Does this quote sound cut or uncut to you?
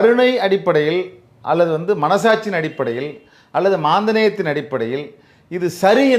uncut